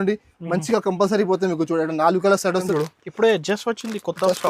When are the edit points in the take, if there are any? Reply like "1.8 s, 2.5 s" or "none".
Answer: 2.7 s